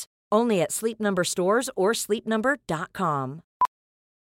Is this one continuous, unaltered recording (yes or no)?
yes